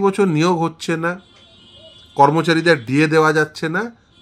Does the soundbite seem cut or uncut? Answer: uncut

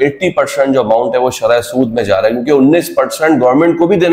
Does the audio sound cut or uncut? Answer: uncut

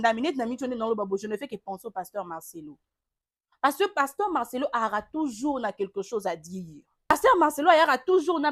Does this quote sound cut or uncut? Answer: cut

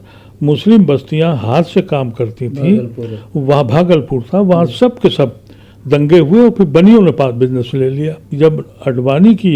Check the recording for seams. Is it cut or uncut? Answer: cut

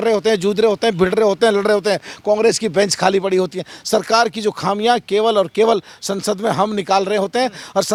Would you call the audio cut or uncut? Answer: uncut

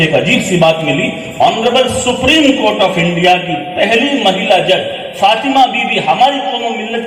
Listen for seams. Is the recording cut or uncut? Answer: uncut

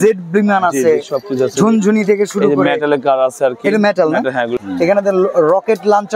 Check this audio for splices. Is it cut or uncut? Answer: cut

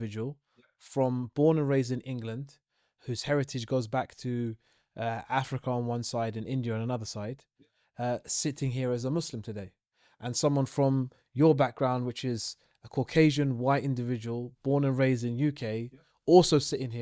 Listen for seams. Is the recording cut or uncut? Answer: uncut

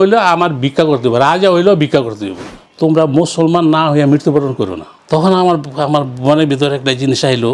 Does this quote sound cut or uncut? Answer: cut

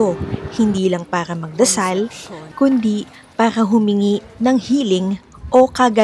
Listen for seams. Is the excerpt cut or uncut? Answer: uncut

